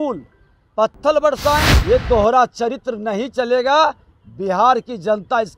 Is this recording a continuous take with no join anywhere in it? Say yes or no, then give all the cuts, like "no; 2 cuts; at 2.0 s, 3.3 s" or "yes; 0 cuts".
no; 1 cut; at 1.7 s